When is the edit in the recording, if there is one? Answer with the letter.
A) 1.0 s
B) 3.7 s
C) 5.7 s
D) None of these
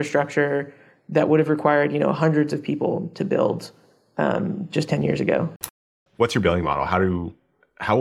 C